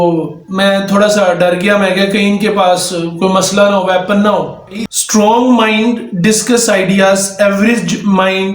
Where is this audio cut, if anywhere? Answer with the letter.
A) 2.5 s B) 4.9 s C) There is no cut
B